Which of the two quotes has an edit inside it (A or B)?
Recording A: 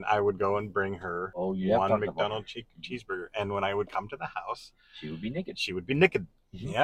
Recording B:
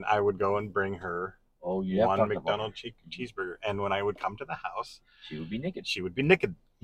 A